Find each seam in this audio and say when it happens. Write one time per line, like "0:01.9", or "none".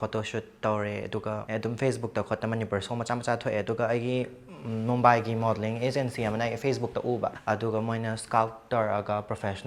0:01.4
0:07.4